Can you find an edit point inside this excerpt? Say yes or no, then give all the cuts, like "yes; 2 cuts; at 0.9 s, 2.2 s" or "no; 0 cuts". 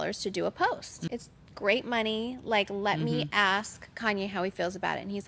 yes; 1 cut; at 1.0 s